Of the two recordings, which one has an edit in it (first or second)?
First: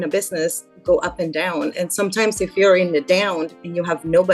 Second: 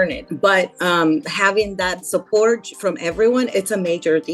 second